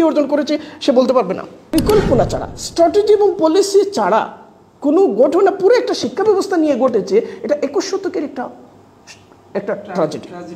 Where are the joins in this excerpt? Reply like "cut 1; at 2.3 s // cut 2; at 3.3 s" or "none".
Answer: cut 1; at 1.7 s